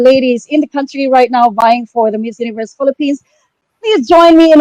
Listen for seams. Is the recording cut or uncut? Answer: uncut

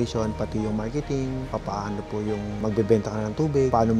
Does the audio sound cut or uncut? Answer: uncut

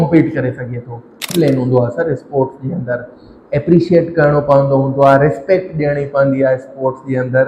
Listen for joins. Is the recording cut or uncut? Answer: cut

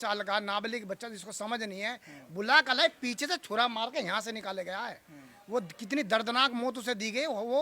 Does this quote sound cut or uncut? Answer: uncut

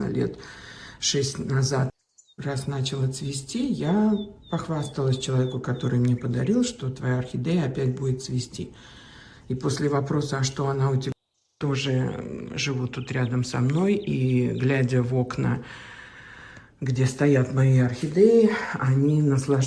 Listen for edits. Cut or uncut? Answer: cut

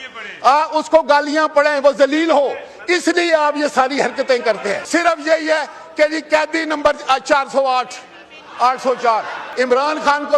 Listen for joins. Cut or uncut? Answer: cut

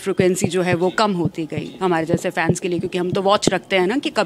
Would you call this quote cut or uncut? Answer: uncut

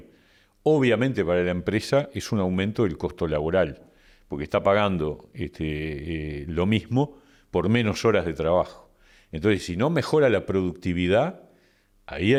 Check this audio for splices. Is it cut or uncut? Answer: uncut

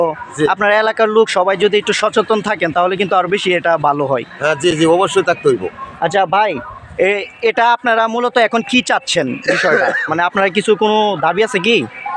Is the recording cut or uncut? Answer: uncut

